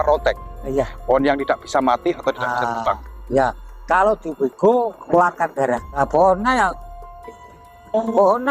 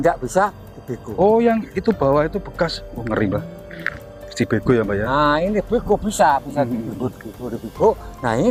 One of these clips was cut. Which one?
first; 2 cuts; at 5.0 s, 6.0 s

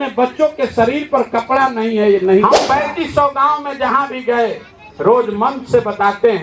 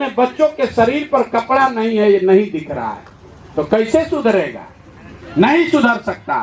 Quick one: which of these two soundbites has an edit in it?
first; 1 cut; at 2.6 s

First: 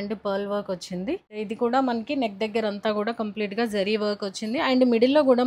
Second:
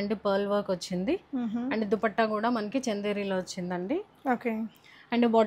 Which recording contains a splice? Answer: first; 1 cut; at 1.3 s

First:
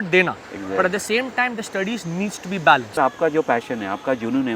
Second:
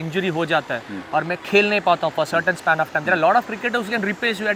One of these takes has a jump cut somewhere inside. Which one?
first; 1 cut; at 3.0 s

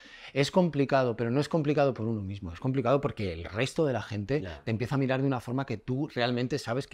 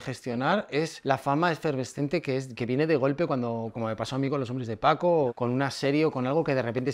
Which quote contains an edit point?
second; 2 cuts; at 0.9 s, 5.3 s

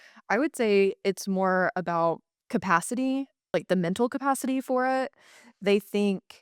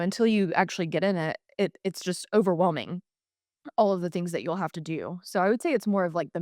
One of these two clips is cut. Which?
first; 2 cuts; at 2.3 s, 3.4 s

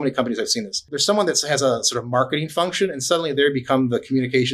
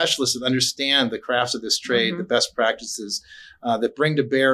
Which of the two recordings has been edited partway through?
first; 1 cut; at 0.9 s

